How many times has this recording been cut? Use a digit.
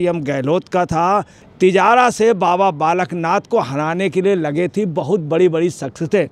1